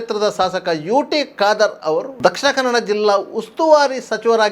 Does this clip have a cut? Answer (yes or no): yes